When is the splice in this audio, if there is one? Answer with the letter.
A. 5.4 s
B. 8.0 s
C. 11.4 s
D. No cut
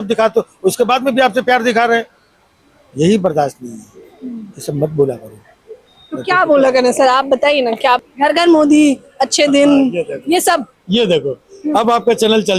B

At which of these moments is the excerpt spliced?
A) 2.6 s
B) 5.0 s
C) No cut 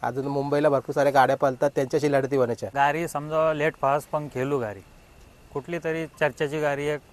A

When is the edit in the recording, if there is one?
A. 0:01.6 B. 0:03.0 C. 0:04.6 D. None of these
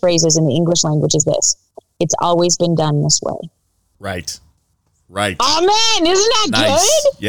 D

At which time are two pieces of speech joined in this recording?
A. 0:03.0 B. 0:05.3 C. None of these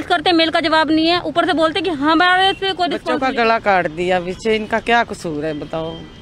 A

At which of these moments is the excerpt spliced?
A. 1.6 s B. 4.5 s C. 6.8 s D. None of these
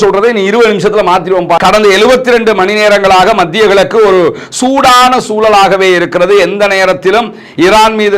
A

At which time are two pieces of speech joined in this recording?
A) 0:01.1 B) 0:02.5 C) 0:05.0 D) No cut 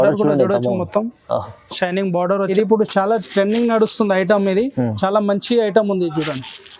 B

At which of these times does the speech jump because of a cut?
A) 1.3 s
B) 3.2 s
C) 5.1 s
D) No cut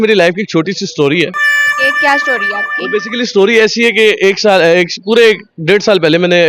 D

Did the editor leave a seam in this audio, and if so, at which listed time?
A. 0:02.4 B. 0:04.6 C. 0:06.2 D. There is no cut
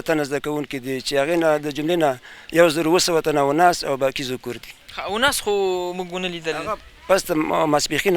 D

